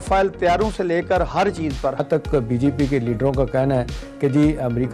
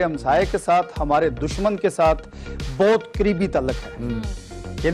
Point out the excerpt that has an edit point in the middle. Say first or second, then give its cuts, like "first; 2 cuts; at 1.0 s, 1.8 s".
first; 1 cut; at 2.0 s